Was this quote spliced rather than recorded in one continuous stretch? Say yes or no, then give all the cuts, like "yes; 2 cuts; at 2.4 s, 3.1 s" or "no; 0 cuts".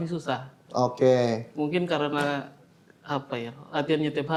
no; 0 cuts